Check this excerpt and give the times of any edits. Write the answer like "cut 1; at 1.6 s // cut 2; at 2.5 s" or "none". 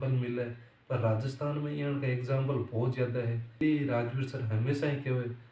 cut 1; at 3.6 s